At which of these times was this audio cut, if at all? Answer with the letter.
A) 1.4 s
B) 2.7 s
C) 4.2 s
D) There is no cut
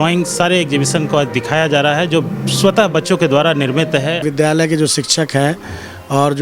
C